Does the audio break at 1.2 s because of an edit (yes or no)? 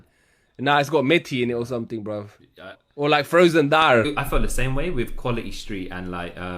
no